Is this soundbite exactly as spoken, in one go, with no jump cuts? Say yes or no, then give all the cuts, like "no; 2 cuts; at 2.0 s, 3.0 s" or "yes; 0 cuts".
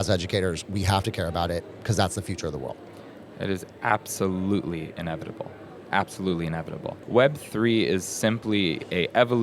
no; 1 cut; at 6.9 s